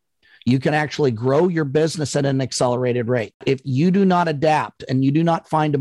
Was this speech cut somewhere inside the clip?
yes; 1 cut; at 3.4 s

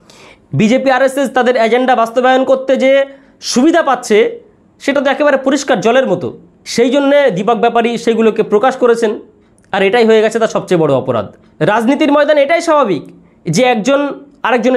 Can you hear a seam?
no; 0 cuts

